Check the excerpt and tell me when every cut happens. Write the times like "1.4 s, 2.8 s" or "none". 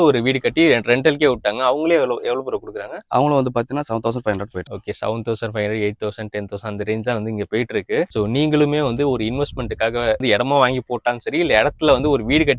none